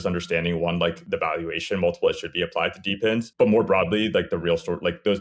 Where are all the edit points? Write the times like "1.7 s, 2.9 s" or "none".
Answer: 1.0 s, 3.3 s